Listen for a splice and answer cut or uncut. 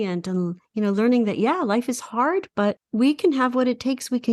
cut